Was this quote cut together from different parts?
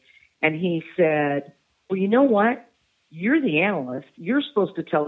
no; 0 cuts

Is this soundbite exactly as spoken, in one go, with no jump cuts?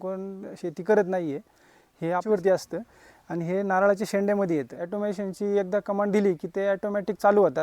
no; 2 cuts; at 2.3 s, 4.8 s

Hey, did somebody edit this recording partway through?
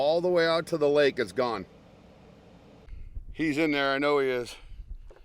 yes; 1 cut; at 3.2 s

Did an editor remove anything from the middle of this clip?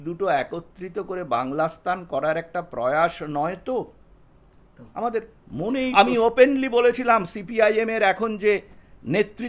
yes; 1 cut; at 5.9 s

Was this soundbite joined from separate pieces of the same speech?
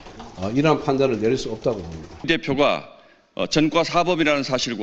yes; 1 cut; at 2.2 s

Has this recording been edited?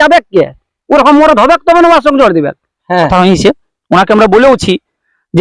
yes; 1 cut; at 3.0 s

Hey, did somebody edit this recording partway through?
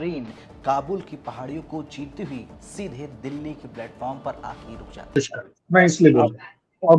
yes; 1 cut; at 5.1 s

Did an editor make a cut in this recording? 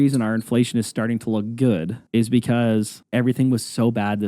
yes; 2 cuts; at 2.0 s, 3.0 s

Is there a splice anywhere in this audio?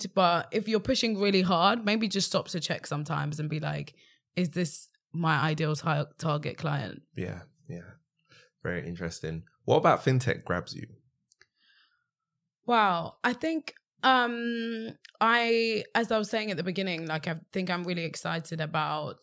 no; 0 cuts

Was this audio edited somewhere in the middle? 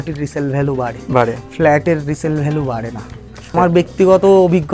yes; 1 cut; at 3.5 s

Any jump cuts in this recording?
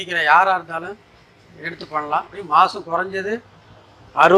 yes; 1 cut; at 2.4 s

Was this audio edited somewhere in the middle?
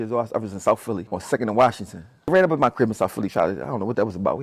yes; 2 cuts; at 1.1 s, 2.3 s

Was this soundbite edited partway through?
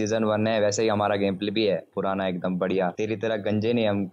no; 0 cuts

